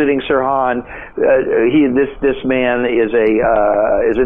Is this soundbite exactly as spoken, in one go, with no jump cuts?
yes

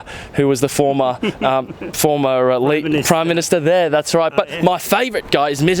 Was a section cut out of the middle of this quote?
no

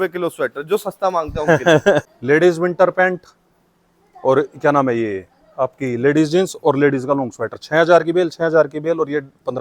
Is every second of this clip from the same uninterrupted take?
no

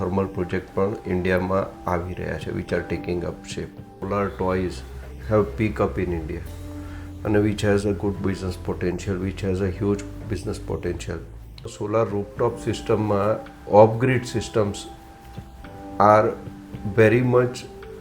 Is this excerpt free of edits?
no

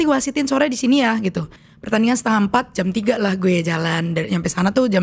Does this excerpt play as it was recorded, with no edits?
no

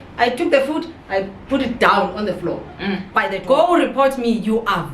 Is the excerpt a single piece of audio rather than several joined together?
no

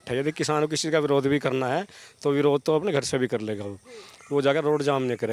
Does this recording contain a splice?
no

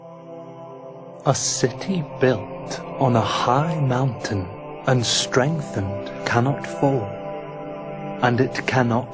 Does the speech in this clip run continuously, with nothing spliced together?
yes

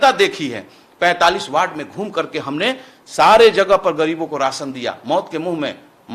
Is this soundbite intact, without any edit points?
yes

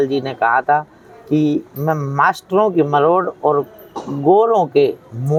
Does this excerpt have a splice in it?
no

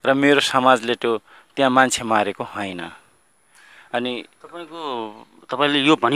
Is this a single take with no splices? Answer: yes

